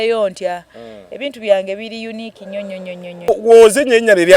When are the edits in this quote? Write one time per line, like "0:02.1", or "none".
0:03.3